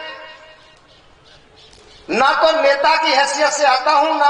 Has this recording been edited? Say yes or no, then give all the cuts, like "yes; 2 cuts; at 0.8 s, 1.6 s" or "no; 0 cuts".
no; 0 cuts